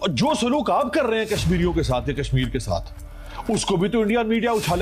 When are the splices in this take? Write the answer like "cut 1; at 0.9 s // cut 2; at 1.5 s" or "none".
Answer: none